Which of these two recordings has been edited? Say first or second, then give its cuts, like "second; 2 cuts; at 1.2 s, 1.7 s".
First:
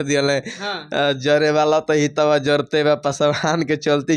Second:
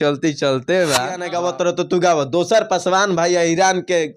second; 1 cut; at 1.3 s